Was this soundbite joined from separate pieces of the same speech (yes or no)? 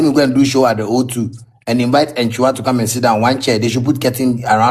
no